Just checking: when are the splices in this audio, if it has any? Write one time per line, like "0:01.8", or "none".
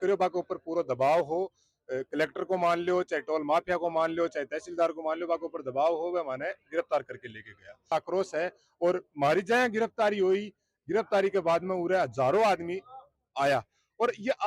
0:07.9